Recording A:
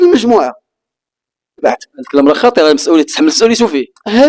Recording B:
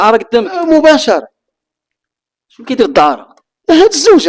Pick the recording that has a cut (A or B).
A